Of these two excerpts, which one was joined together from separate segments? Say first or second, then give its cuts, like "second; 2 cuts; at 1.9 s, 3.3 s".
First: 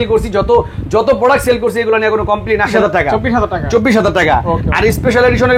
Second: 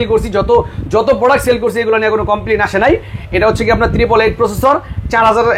first; 1 cut; at 2.7 s